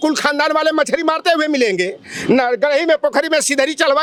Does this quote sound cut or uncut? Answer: uncut